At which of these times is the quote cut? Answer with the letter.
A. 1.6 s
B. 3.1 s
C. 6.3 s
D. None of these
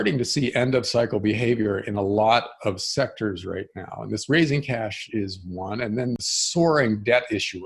C